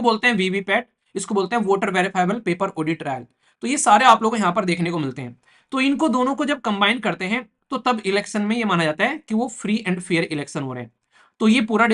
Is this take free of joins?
yes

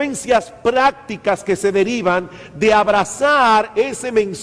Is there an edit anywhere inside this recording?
no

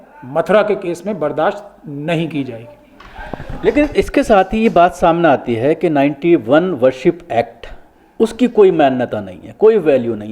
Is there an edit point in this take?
no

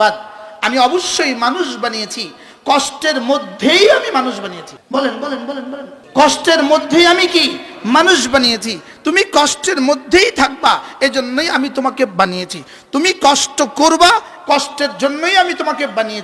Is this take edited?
yes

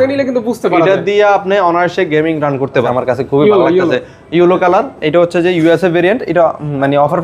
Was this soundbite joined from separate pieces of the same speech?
yes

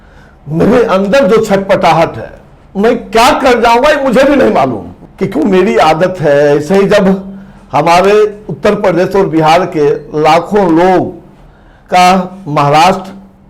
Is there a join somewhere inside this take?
no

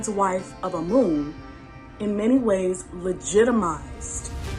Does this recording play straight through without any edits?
yes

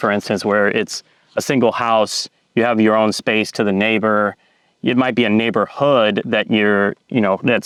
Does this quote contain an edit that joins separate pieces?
no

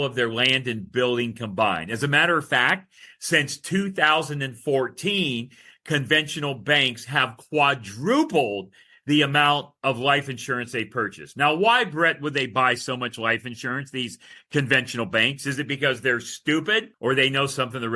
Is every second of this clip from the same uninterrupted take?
no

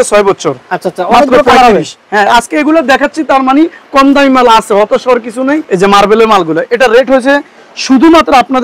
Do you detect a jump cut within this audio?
yes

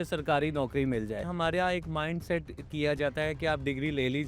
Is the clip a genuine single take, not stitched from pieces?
no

